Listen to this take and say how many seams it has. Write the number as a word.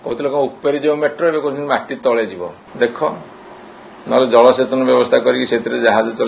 one